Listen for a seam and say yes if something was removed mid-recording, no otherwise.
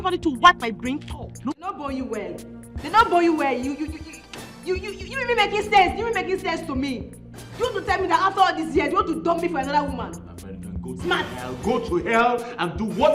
yes